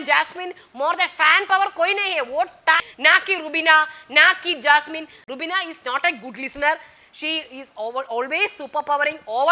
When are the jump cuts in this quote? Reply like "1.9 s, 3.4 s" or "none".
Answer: 2.8 s, 5.2 s